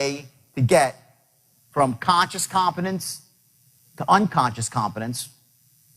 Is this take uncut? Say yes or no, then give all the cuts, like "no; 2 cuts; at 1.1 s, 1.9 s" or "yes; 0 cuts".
yes; 0 cuts